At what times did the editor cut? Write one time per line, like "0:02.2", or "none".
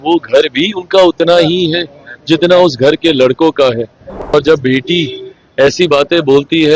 0:04.3